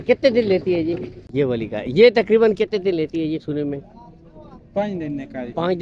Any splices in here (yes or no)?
yes